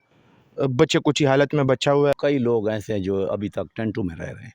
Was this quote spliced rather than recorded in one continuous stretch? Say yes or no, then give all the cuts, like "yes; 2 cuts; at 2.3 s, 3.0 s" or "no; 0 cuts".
yes; 1 cut; at 2.1 s